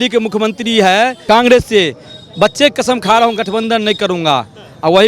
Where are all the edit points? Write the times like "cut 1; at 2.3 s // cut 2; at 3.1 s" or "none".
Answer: cut 1; at 1.2 s